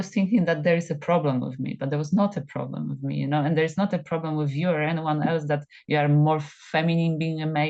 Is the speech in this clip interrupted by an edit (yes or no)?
no